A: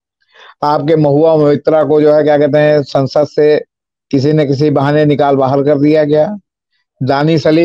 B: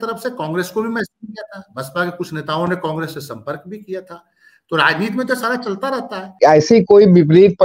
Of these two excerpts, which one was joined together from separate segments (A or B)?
B